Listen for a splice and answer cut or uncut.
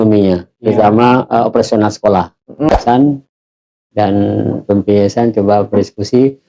cut